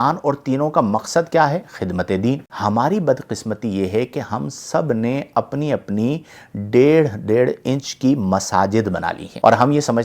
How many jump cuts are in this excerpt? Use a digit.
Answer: 1